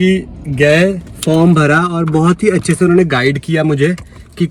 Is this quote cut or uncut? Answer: uncut